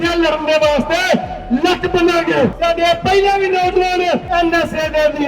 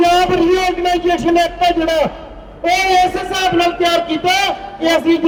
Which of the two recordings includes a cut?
first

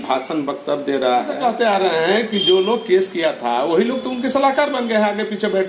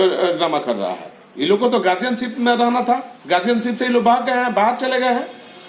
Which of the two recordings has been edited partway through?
first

